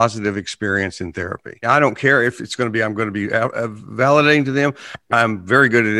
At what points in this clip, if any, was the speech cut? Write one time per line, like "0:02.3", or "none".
none